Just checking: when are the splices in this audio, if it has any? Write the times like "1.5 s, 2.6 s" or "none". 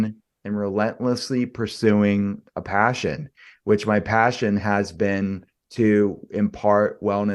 none